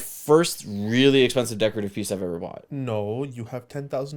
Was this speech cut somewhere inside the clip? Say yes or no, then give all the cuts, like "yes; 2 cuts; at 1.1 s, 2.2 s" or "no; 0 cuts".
yes; 1 cut; at 2.6 s